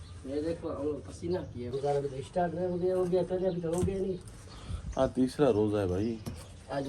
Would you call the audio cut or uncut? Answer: cut